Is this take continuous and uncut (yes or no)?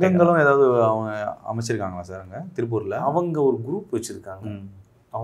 yes